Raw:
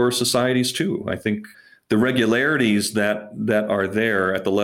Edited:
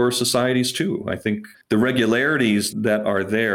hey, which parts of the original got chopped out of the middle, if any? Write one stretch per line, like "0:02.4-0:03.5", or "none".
0:01.5-0:01.7
0:02.9-0:03.3